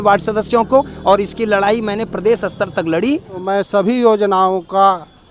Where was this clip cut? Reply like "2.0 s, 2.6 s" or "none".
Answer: 3.4 s